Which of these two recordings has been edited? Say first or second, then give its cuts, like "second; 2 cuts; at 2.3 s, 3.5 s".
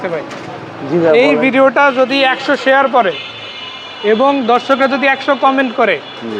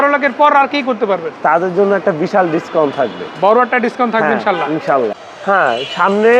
second; 1 cut; at 5.2 s